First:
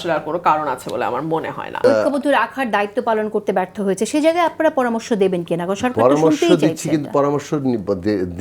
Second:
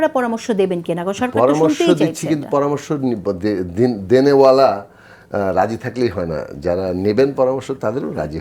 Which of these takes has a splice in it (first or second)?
first